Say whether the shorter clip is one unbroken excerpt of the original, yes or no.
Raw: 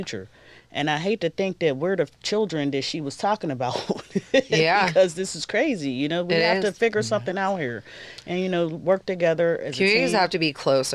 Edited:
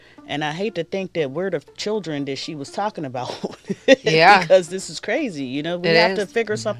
yes